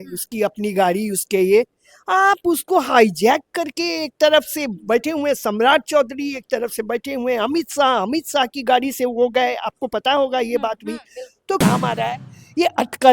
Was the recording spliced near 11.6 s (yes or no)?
yes